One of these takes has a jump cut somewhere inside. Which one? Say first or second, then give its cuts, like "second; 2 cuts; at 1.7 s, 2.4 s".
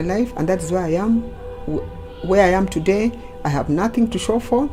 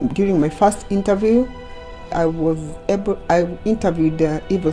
second; 1 cut; at 2.1 s